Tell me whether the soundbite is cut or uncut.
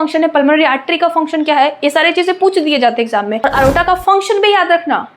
cut